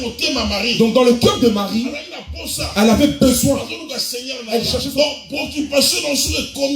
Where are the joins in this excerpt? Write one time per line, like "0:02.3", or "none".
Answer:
0:04.8